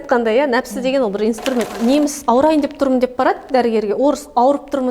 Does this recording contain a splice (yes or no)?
yes